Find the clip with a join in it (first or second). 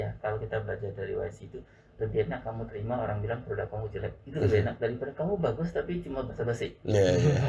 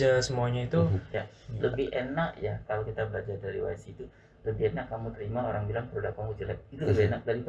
second